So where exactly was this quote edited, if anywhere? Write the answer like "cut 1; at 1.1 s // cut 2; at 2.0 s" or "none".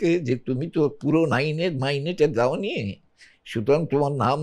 none